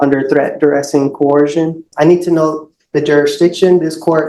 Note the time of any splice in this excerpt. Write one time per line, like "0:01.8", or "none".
0:01.9